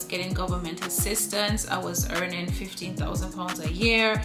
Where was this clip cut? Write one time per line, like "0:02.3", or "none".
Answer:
none

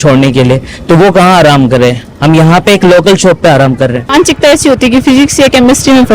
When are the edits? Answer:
0:04.1

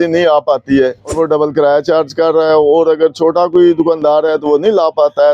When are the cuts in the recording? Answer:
0:01.1

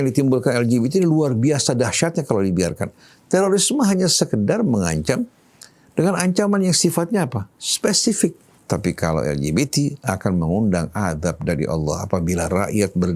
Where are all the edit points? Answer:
0:08.5

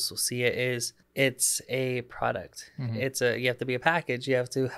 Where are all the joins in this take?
0:01.0

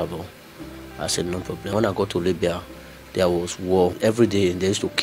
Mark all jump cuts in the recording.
0:01.7
0:04.0

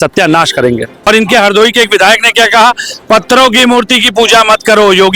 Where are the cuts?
0:01.1

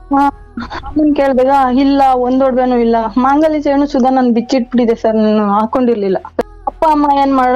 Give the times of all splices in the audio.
0:06.5

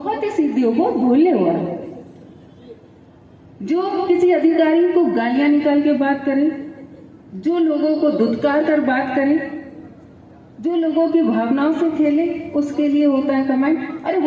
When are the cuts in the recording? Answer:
none

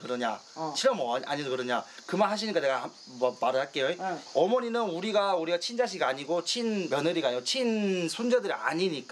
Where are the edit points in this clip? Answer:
0:06.9

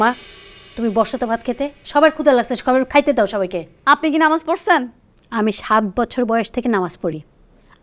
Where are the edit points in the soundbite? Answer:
0:03.7

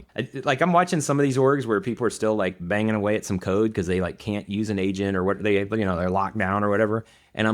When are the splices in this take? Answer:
none

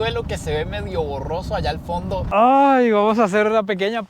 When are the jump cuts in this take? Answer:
0:02.3

